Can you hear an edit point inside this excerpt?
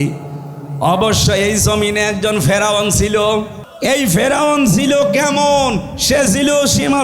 yes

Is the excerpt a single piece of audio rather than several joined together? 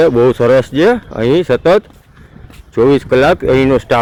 yes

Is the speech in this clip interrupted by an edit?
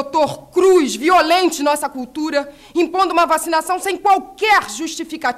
no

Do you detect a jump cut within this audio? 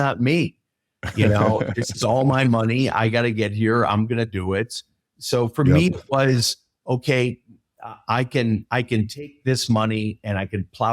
no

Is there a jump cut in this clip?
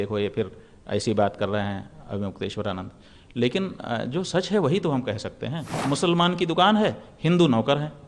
yes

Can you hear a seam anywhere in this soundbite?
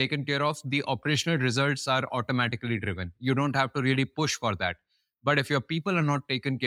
no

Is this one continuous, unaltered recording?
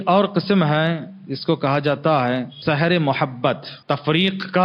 no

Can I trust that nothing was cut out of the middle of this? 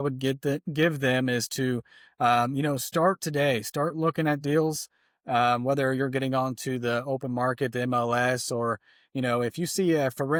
yes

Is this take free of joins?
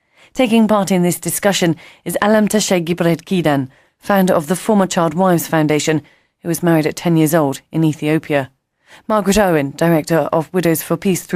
yes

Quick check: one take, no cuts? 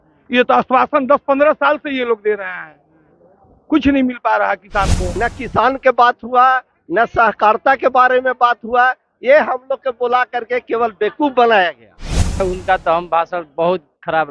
no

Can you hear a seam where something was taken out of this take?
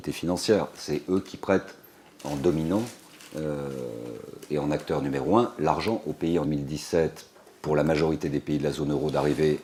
no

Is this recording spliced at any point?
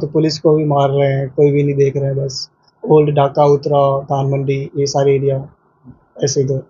no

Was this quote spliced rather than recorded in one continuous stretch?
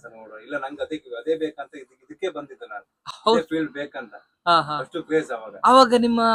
no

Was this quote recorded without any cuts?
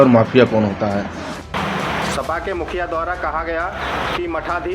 no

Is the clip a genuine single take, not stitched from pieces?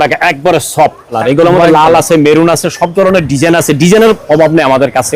no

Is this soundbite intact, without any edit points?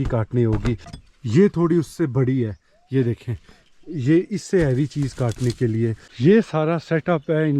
no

